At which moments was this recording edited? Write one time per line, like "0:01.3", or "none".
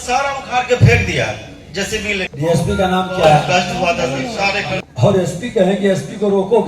0:02.3
0:04.8